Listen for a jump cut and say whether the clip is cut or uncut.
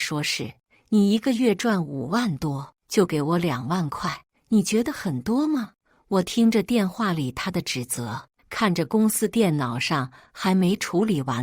cut